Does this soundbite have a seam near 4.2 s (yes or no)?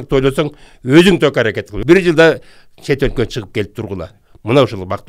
no